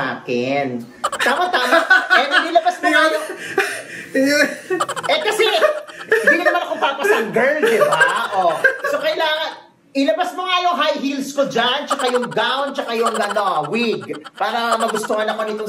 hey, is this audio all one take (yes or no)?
yes